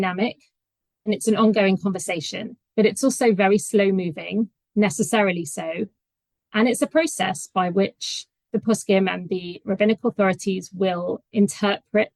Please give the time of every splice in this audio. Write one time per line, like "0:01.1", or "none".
none